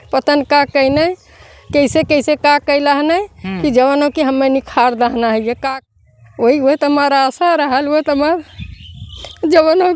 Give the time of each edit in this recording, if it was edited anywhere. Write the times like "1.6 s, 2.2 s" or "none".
5.7 s